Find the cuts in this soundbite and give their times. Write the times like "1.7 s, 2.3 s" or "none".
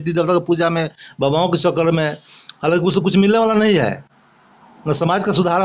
none